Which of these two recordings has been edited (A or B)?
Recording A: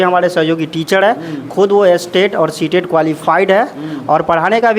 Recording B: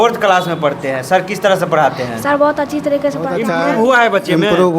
B